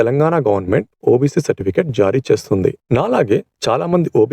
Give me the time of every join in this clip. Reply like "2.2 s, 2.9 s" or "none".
2.8 s